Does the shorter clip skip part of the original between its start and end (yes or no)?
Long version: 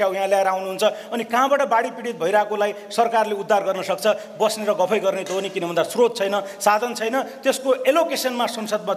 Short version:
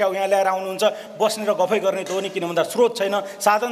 yes